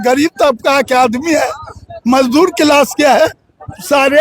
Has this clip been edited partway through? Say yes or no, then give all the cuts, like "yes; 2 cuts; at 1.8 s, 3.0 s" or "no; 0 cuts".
no; 0 cuts